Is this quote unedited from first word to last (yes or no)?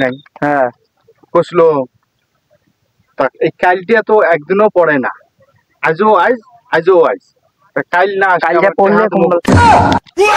no